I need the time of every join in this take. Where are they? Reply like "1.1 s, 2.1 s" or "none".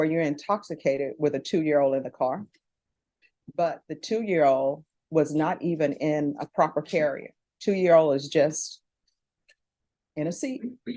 none